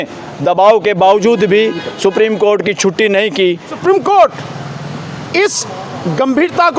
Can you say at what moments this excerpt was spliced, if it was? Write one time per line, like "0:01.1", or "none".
0:03.7